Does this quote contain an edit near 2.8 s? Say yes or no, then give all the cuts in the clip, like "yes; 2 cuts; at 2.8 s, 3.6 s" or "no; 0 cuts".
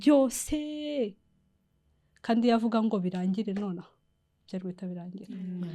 no; 0 cuts